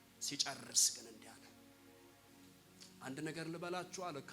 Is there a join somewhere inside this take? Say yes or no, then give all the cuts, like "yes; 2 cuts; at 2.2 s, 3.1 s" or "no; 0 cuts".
no; 0 cuts